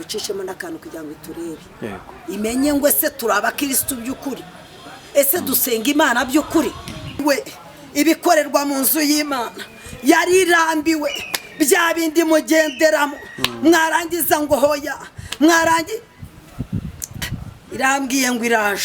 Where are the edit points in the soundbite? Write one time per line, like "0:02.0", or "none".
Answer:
0:07.2